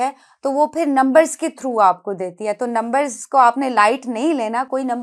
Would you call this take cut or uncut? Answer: uncut